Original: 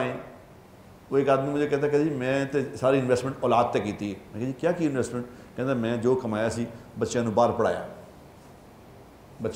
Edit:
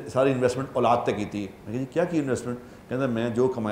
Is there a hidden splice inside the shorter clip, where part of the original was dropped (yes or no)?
no